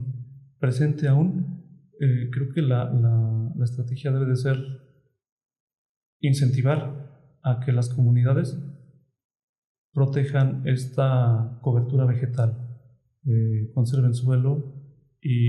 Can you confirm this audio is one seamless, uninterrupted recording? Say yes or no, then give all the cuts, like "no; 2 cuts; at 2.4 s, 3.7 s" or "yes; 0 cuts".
yes; 0 cuts